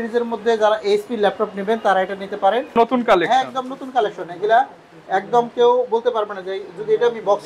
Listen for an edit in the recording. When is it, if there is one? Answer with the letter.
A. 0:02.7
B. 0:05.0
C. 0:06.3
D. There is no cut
A